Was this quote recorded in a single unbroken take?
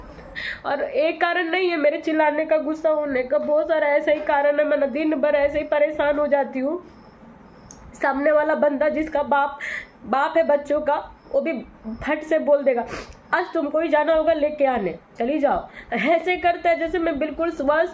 yes; 0 cuts

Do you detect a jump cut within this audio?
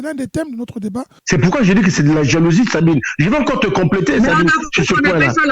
yes; 1 cut; at 1.1 s

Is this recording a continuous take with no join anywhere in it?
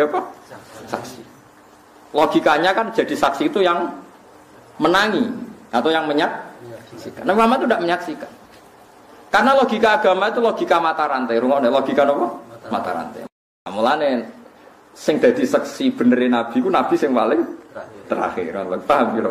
no; 1 cut; at 13.3 s

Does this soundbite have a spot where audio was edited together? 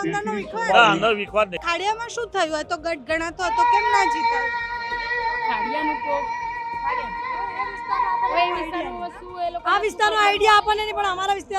yes; 1 cut; at 1.6 s

